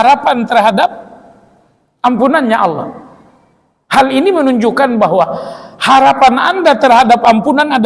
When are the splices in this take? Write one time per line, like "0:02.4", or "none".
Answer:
none